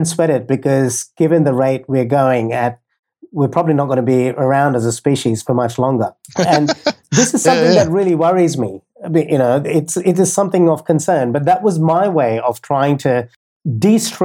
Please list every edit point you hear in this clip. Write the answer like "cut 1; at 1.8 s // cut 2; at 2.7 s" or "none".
none